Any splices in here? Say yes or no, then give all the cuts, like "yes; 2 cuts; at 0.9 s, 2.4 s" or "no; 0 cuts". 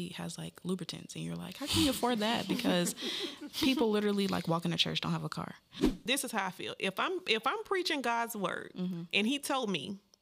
yes; 2 cuts; at 6.0 s, 9.0 s